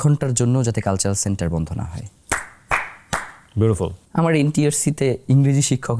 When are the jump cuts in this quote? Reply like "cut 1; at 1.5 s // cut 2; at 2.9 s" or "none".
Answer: cut 1; at 4.0 s